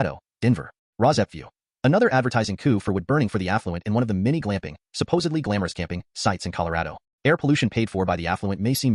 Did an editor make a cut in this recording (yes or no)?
no